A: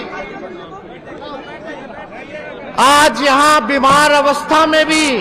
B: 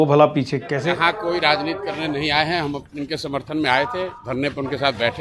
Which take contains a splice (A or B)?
B